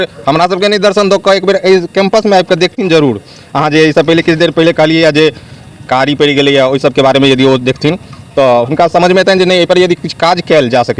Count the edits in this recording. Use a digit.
0